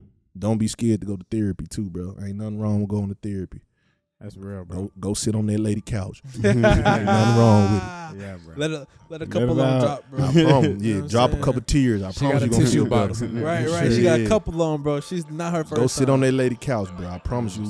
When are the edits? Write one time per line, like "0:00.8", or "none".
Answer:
none